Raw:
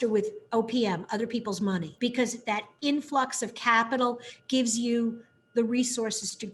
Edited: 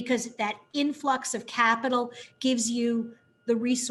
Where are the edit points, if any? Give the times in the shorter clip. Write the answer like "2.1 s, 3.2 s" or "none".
none